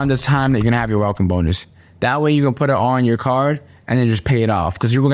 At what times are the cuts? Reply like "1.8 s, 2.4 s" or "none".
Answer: none